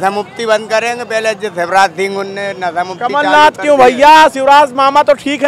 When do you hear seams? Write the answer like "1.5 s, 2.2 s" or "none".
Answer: none